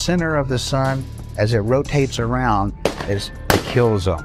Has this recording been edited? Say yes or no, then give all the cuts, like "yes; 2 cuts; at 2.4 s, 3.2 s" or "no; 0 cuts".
no; 0 cuts